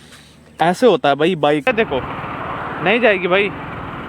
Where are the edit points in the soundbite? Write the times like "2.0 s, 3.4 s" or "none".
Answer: 1.7 s